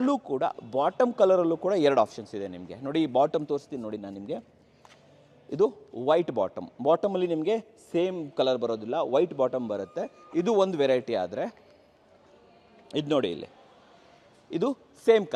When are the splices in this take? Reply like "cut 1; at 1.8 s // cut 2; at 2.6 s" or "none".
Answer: none